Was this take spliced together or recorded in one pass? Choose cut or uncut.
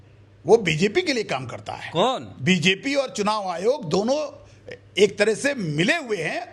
uncut